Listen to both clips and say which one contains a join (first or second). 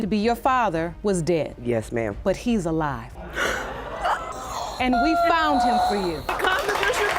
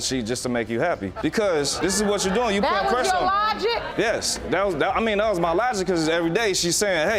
first